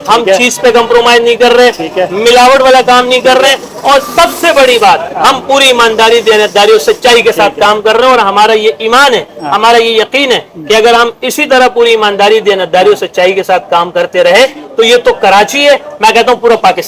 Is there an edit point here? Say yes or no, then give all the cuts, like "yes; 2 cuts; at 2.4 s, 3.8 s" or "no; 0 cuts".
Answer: no; 0 cuts